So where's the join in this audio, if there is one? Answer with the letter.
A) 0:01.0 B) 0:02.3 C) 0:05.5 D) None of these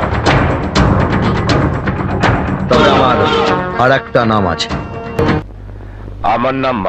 C